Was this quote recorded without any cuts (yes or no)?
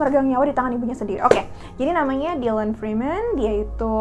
yes